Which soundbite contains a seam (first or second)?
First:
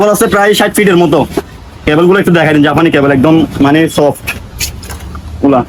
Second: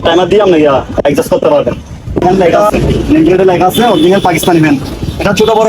second